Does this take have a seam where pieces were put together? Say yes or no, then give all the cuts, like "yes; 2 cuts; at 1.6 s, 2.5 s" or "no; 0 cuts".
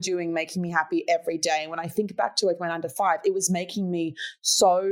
no; 0 cuts